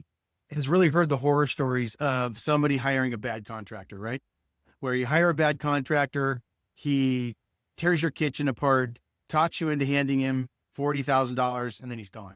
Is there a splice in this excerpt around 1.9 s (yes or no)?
no